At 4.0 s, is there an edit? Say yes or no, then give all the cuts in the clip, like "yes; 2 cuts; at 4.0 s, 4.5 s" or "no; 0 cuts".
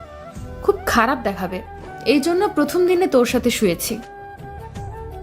yes; 1 cut; at 4.0 s